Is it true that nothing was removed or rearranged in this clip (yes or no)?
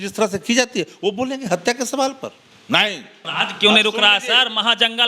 no